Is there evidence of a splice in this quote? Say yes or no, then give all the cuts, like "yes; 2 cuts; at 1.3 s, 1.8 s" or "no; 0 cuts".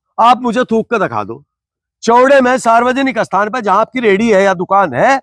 no; 0 cuts